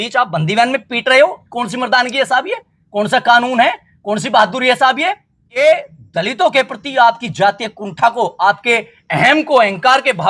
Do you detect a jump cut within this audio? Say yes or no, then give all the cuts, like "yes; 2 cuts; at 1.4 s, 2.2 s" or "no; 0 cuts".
yes; 1 cut; at 5.5 s